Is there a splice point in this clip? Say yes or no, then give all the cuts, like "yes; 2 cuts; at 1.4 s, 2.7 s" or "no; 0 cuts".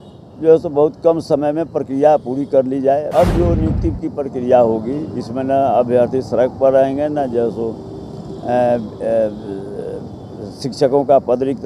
yes; 1 cut; at 3.1 s